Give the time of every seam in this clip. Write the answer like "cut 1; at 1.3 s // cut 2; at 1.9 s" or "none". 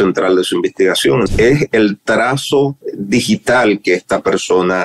cut 1; at 1.3 s // cut 2; at 2.9 s